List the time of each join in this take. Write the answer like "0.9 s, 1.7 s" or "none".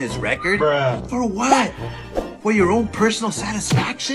none